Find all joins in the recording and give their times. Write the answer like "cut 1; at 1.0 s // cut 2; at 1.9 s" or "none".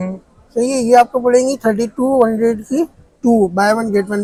none

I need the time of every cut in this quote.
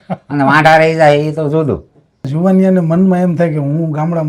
cut 1; at 2.3 s

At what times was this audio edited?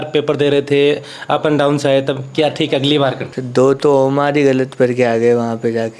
cut 1; at 3.3 s

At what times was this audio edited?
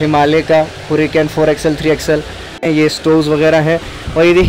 cut 1; at 2.7 s

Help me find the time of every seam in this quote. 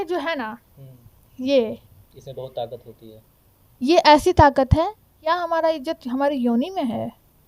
cut 1; at 5.3 s

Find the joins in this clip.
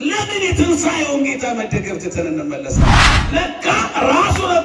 cut 1; at 3.1 s

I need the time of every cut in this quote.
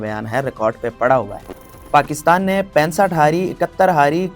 cut 1; at 1.9 s

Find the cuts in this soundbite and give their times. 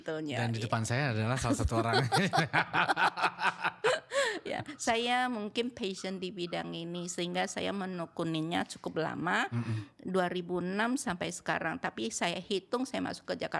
none

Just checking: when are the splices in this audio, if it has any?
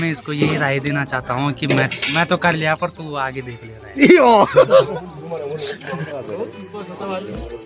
cut 1; at 6.1 s

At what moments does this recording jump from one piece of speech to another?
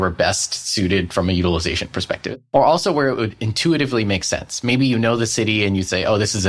cut 1; at 2.2 s

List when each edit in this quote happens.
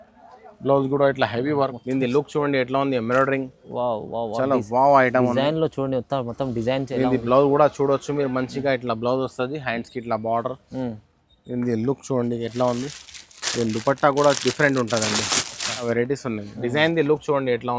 cut 1; at 1.7 s // cut 2; at 15.8 s

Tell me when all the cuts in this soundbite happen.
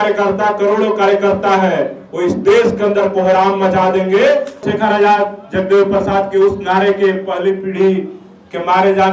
cut 1; at 4.6 s

